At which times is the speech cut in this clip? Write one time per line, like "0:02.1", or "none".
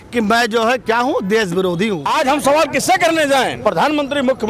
0:02.1
0:03.5